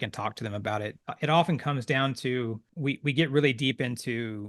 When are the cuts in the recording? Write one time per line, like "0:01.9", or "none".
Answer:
0:01.0
0:02.7